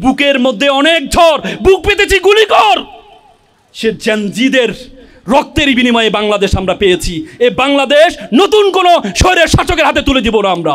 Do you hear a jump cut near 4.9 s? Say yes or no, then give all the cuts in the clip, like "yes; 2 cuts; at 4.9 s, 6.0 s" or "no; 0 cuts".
no; 0 cuts